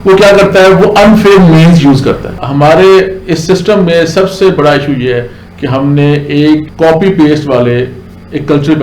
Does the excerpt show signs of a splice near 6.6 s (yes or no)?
yes